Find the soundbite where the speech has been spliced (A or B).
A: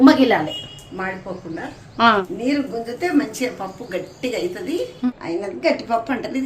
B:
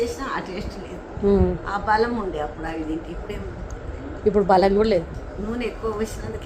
A